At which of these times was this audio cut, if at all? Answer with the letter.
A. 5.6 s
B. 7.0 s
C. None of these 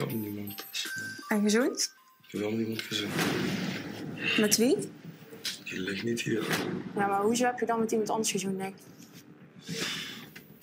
B